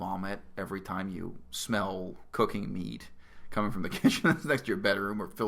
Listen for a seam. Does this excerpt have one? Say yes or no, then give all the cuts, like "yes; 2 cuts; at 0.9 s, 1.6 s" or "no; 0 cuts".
no; 0 cuts